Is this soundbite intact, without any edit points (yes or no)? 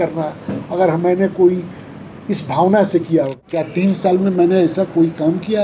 no